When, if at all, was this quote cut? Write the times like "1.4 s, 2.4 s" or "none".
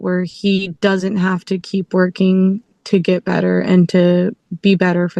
none